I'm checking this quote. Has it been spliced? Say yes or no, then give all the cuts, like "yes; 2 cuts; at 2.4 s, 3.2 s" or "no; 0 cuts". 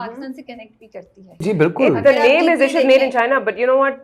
yes; 1 cut; at 1.4 s